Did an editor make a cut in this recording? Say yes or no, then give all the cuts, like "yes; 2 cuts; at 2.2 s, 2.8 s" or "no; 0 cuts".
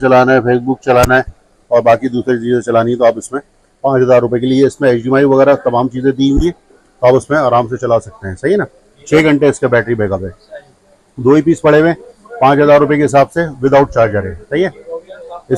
no; 0 cuts